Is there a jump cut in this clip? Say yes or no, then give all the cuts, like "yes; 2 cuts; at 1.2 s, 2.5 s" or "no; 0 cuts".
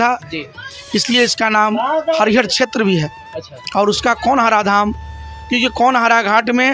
no; 0 cuts